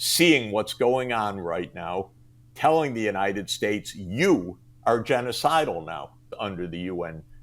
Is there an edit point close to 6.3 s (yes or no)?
yes